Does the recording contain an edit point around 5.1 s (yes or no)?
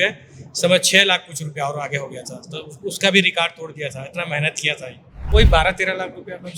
yes